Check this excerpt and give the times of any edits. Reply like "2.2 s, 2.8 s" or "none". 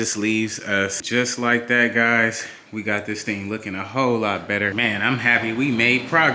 1.0 s, 4.7 s